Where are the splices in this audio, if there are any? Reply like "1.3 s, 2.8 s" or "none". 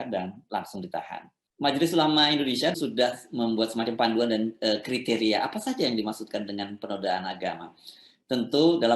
1.4 s, 2.7 s